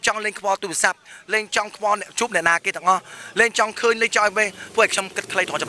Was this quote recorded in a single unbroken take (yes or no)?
yes